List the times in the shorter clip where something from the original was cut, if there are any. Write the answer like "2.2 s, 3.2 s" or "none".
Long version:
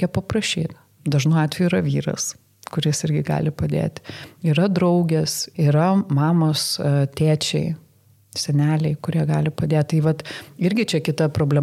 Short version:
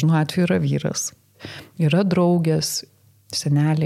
1.4 s, 2.8 s